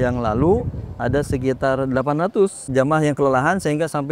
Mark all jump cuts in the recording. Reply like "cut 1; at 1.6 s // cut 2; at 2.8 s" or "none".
cut 1; at 2.7 s